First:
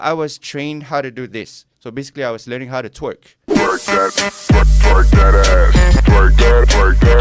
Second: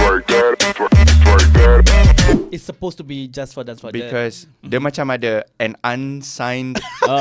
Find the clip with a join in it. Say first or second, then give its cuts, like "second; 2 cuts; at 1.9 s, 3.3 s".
second; 1 cut; at 2.3 s